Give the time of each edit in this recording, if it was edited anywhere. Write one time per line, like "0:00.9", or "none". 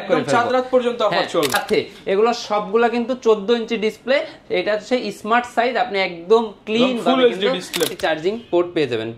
0:01.5
0:07.9